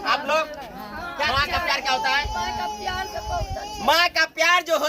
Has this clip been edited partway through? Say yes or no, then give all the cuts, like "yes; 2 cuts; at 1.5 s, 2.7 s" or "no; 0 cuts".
yes; 1 cut; at 1.3 s